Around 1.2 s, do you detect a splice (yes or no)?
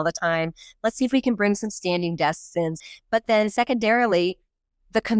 no